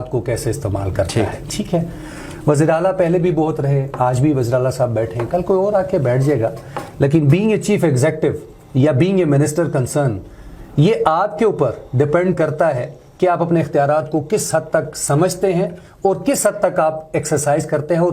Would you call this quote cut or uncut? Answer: uncut